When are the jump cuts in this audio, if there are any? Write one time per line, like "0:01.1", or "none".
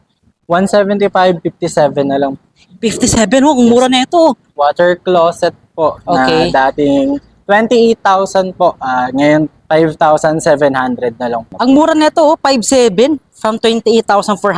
0:04.5
0:11.5